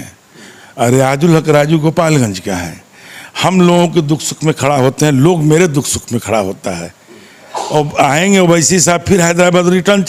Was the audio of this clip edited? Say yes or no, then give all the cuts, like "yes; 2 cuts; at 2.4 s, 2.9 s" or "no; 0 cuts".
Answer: no; 0 cuts